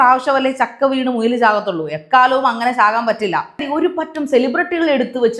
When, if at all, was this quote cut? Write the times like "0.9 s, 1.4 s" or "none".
3.6 s